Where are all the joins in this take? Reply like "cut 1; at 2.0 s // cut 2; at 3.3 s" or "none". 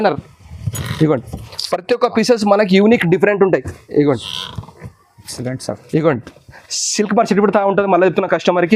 none